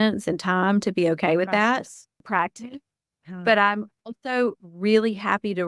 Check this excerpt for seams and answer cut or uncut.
cut